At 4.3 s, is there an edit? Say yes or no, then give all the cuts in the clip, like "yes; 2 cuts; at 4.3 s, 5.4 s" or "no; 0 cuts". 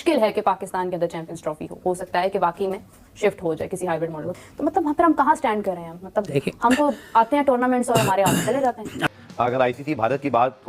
yes; 2 cuts; at 4.3 s, 9.1 s